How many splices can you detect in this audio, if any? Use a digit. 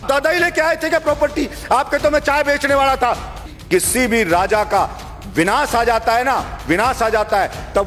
1